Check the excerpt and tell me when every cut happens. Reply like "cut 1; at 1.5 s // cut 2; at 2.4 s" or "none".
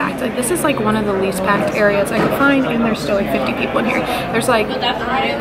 none